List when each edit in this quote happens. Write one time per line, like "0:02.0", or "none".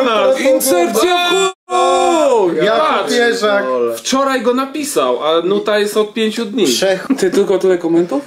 0:07.0